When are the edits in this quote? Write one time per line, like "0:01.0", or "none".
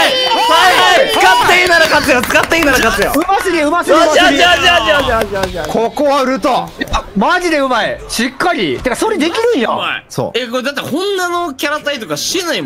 none